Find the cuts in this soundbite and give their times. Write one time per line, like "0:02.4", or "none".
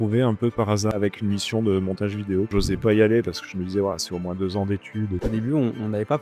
0:00.9
0:02.5
0:05.2